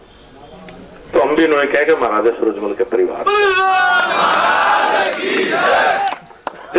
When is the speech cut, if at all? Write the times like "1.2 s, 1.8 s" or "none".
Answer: none